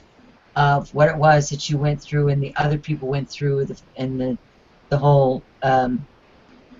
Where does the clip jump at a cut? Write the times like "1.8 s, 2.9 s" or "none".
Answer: 4.5 s